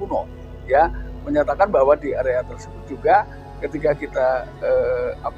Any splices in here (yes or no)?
no